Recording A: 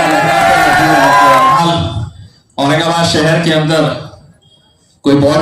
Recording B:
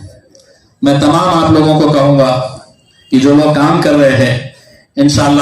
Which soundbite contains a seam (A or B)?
A